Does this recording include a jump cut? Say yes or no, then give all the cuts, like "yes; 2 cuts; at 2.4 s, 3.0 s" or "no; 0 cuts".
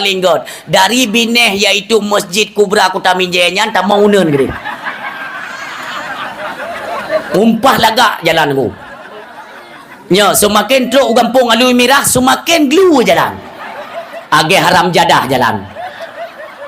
no; 0 cuts